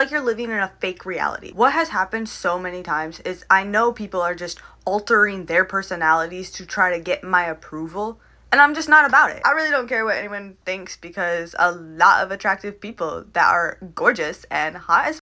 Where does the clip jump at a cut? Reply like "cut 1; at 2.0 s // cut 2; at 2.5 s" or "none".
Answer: cut 1; at 1.4 s // cut 2; at 9.4 s